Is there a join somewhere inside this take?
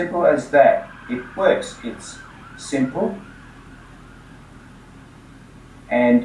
no; 0 cuts

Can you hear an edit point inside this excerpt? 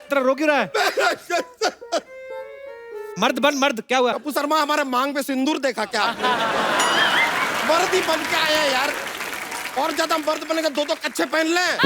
yes; 1 cut; at 4.2 s

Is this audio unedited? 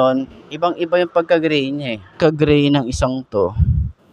no; 1 cut; at 2.1 s

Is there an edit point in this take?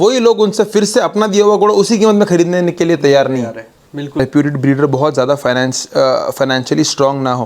yes; 1 cut; at 4.2 s

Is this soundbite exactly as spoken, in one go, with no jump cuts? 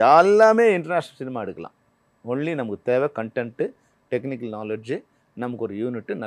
yes; 0 cuts

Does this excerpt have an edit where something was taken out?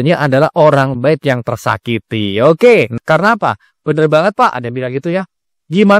yes; 1 cut; at 3.0 s

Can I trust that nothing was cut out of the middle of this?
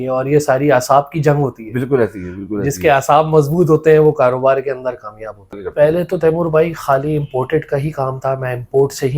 no; 1 cut; at 5.6 s

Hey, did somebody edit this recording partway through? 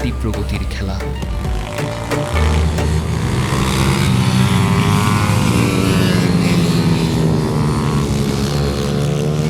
no; 0 cuts

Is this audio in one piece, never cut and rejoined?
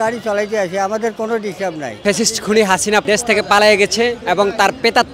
no; 2 cuts; at 2.0 s, 3.0 s

